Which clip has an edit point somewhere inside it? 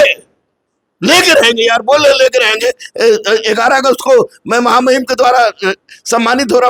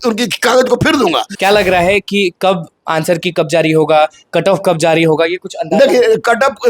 second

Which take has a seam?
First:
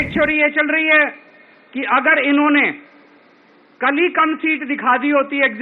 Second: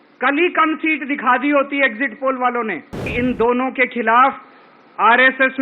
second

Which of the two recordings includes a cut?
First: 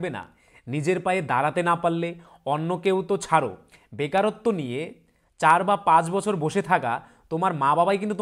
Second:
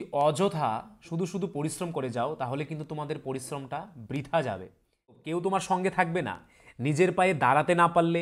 second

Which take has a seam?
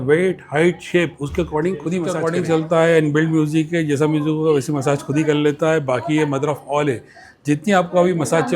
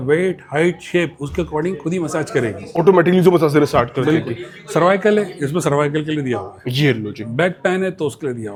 first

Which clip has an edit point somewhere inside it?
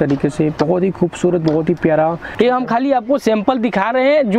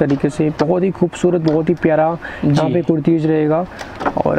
first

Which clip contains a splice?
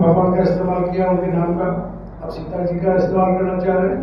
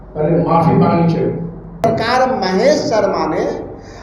second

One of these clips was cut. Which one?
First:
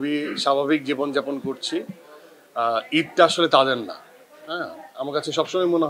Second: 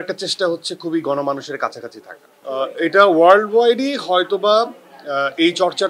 second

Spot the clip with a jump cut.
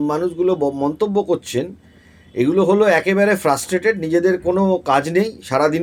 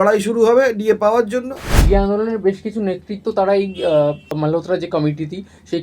second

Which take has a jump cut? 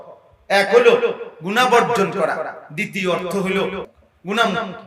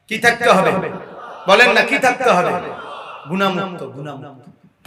first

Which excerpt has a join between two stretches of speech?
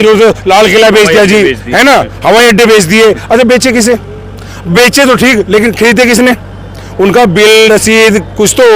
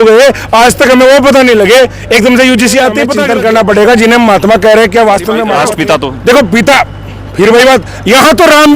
second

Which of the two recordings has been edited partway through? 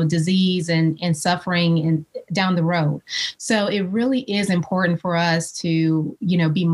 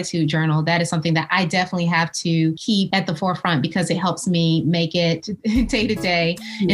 second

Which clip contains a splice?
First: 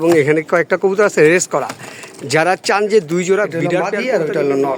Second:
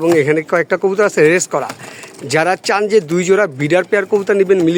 first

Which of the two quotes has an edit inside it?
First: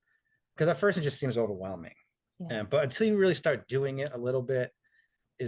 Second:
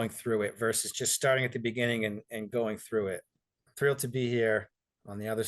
second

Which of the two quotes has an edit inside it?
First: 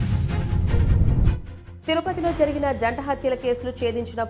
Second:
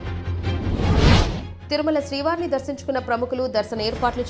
second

